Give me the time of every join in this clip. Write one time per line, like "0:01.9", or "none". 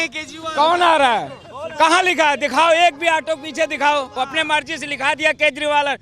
0:04.1